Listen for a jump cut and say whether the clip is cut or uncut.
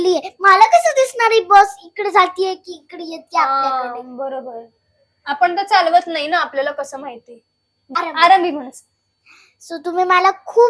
cut